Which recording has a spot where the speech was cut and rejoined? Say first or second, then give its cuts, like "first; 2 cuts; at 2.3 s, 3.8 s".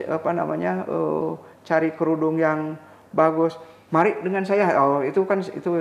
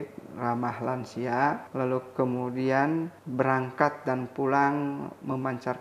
second; 2 cuts; at 1.7 s, 3.2 s